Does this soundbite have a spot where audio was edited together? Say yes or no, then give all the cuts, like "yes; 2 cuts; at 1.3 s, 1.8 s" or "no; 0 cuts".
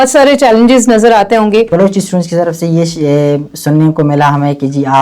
yes; 1 cut; at 1.7 s